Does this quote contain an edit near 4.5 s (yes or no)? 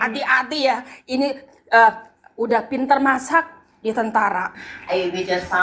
yes